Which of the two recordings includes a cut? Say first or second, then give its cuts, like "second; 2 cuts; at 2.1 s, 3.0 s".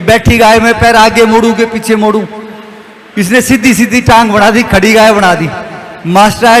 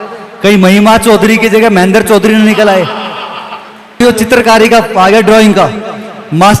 second; 1 cut; at 4.0 s